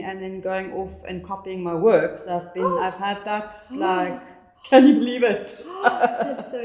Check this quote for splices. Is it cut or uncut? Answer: uncut